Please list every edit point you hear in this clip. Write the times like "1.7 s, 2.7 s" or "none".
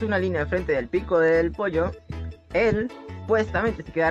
3.2 s